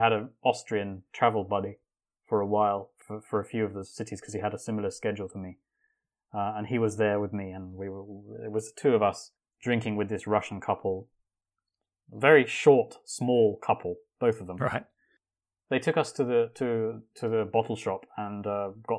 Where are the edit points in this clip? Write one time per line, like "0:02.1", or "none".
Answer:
none